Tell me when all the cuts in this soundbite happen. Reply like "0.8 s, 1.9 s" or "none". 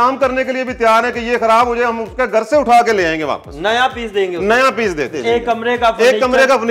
5.2 s